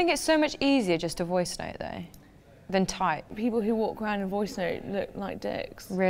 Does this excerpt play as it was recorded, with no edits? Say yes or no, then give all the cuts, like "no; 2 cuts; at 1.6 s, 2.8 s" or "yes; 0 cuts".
no; 1 cut; at 3.3 s